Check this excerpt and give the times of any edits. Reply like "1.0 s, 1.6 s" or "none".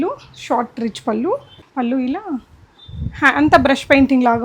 1.6 s